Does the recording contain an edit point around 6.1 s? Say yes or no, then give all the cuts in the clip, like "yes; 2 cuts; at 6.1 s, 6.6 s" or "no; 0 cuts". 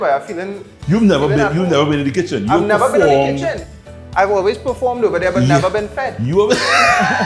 no; 0 cuts